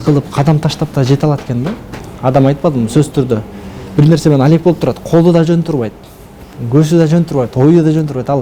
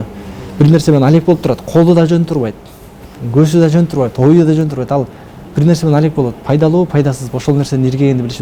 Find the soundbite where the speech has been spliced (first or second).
first